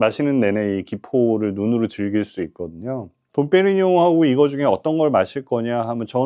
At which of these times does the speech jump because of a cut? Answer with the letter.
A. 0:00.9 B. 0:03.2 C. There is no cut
B